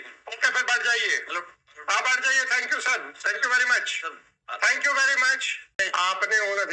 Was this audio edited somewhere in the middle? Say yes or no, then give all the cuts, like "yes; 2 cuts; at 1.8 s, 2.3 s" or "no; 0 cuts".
yes; 1 cut; at 5.8 s